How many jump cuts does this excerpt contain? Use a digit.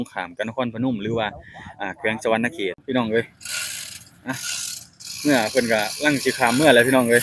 1